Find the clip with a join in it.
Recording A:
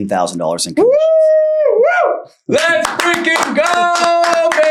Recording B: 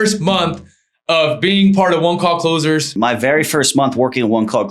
B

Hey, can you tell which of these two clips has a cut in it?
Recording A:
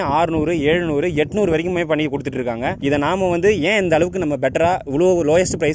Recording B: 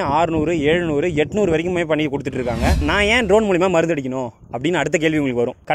B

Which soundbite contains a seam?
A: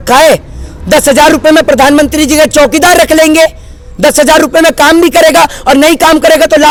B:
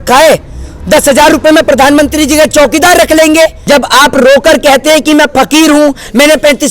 B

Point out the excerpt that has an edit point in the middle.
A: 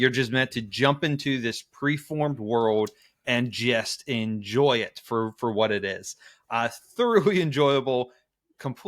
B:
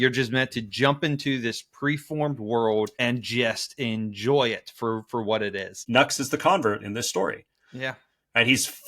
B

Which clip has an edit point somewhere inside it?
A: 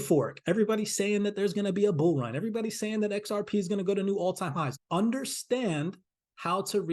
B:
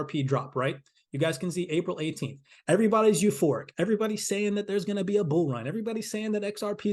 A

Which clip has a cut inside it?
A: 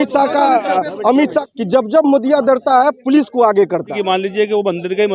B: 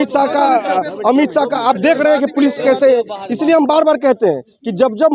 A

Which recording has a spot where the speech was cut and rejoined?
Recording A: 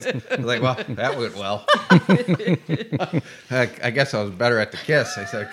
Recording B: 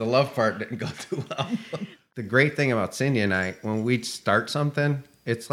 B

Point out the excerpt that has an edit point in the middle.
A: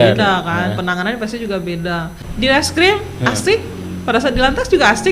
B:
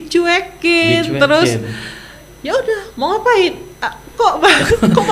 A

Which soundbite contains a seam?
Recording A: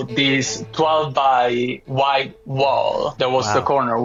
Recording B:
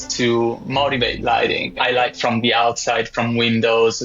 B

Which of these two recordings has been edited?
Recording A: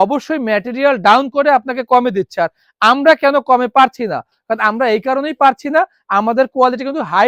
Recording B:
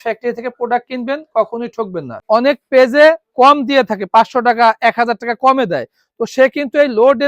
B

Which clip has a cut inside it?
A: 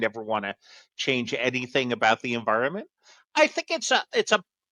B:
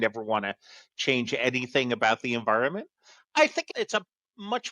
B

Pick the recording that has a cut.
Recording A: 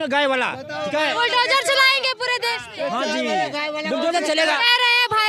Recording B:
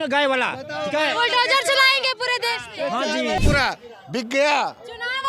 B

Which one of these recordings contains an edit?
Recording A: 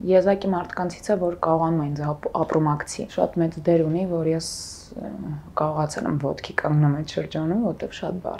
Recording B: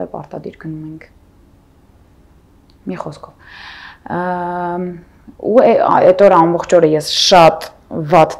A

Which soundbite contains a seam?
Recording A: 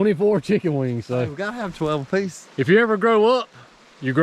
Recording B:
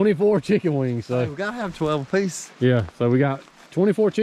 A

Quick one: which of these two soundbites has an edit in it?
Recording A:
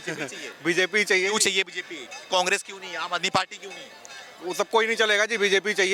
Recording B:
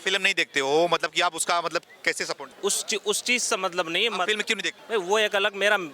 B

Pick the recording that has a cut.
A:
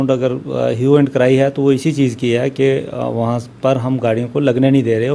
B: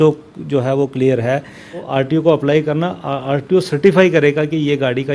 B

